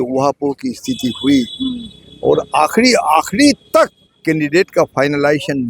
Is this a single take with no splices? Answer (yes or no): no